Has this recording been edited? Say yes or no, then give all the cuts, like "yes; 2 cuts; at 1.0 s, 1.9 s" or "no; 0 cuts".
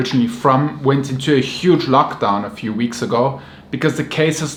no; 0 cuts